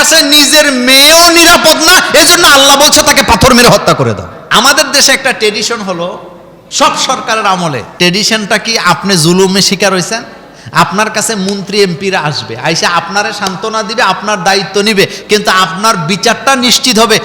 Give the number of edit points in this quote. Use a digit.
2